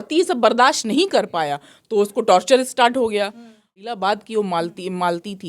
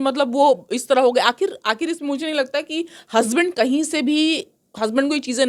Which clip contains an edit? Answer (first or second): first